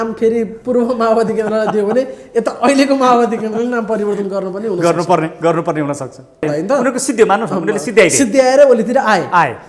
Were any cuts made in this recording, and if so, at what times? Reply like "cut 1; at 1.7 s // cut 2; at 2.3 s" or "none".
cut 1; at 6.5 s